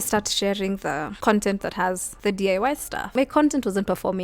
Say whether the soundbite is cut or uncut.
cut